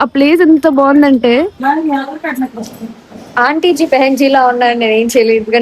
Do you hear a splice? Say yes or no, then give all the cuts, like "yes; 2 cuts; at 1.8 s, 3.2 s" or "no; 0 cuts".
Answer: yes; 1 cut; at 1.5 s